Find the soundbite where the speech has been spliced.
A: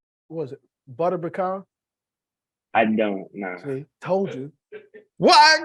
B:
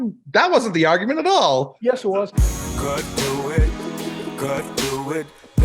B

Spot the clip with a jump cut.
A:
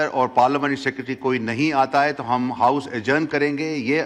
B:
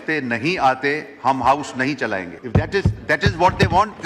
B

